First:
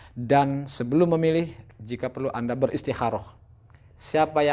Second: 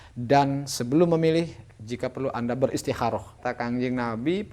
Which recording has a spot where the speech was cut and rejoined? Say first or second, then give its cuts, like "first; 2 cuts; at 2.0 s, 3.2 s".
second; 1 cut; at 3.4 s